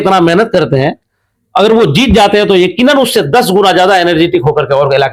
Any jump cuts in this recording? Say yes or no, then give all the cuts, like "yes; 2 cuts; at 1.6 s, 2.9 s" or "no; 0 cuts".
no; 0 cuts